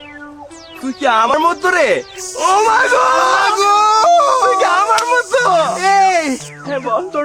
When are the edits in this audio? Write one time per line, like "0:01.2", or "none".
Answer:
0:01.3

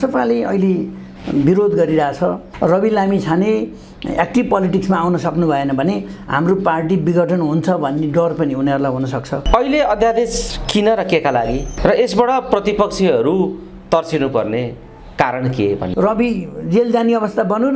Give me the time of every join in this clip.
0:02.5
0:09.3
0:15.9

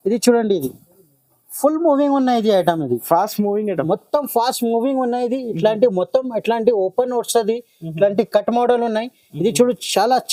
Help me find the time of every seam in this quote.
none

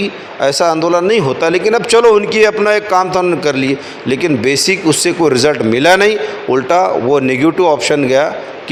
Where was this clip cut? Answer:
none

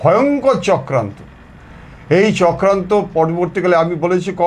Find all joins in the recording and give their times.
none

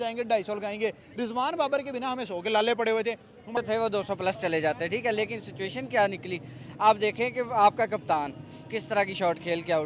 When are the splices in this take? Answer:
0:03.5

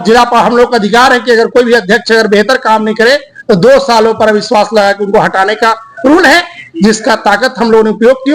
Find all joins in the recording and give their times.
none

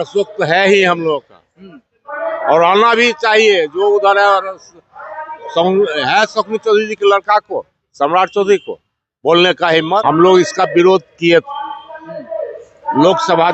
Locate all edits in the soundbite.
0:10.0

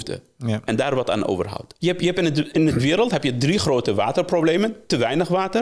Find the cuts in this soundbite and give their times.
0:01.7

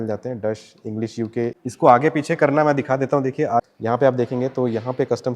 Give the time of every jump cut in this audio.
0:01.6
0:03.6

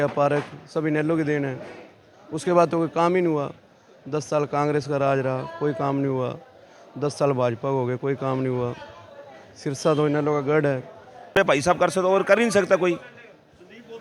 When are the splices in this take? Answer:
0:11.3

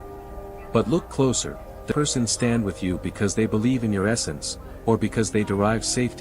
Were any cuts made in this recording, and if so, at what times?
0:01.9

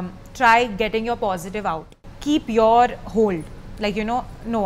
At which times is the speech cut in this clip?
0:01.9

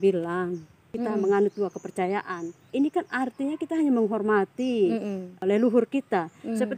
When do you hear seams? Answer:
0:00.9
0:02.6
0:05.4

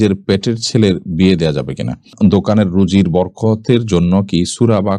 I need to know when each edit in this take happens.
0:02.1

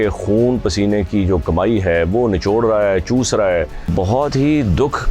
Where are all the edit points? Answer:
0:03.9

